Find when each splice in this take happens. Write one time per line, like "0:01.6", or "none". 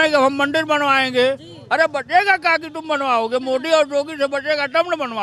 none